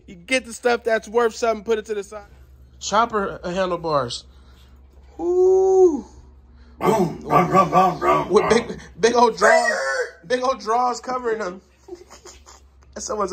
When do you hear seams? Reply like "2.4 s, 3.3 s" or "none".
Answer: 2.1 s

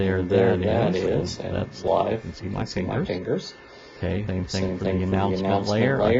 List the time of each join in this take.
1.8 s, 4.3 s

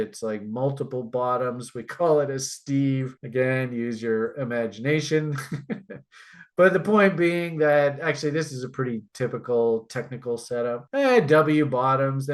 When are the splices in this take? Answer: 10.8 s

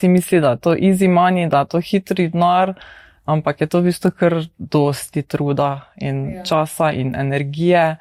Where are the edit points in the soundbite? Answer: none

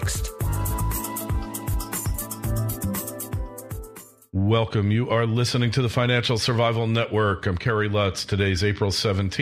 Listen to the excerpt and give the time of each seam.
4.1 s

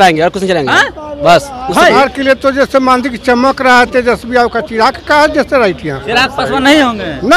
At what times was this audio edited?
2.0 s, 6.0 s

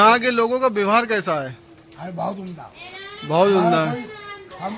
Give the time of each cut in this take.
none

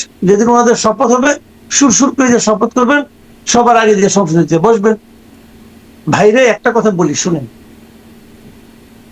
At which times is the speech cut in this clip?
none

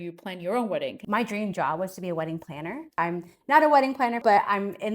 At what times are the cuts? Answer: 1.0 s, 3.0 s, 4.2 s

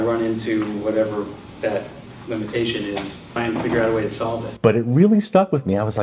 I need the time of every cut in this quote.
3.2 s, 4.5 s

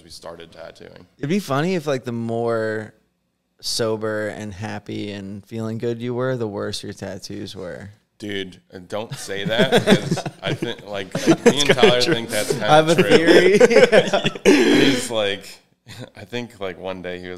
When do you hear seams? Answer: 1.2 s

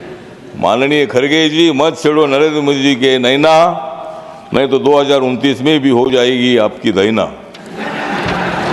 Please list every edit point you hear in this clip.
none

